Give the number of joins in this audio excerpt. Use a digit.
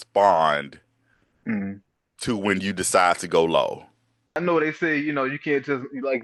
1